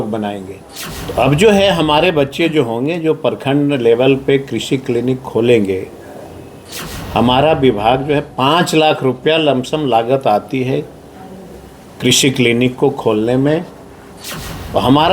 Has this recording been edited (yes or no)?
yes